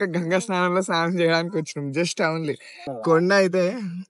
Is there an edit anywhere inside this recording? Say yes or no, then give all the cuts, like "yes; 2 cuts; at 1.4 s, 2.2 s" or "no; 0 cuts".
yes; 1 cut; at 2.9 s